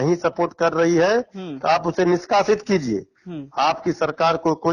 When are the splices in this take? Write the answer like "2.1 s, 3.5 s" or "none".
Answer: none